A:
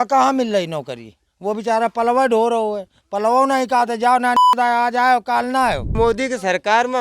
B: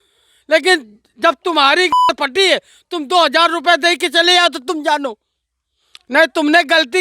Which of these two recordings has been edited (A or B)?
A